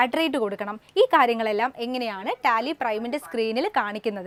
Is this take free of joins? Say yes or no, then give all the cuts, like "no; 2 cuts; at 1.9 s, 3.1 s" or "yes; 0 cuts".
yes; 0 cuts